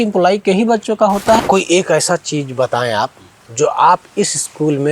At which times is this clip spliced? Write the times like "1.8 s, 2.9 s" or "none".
1.4 s